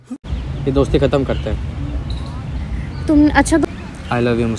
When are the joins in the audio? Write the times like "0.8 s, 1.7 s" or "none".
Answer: 3.6 s